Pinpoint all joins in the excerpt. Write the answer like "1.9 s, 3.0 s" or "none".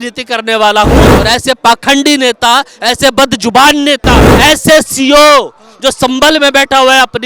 1.1 s, 4.3 s